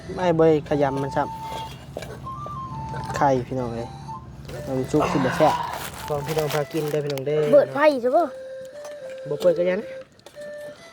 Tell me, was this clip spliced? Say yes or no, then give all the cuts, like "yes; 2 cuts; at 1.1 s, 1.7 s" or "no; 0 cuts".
yes; 1 cut; at 5.5 s